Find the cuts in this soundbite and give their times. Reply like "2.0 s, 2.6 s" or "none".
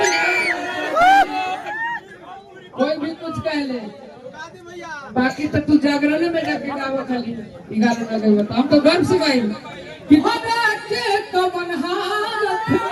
10.2 s